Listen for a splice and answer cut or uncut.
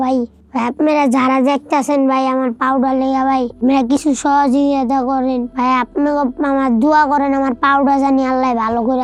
uncut